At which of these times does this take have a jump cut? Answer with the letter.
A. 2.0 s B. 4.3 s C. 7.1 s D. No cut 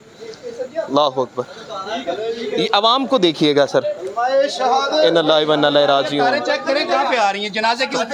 D